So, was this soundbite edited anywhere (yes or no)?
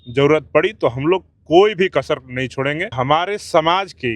yes